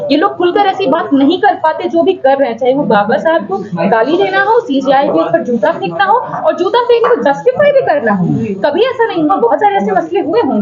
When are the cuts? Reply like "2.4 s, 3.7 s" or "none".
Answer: none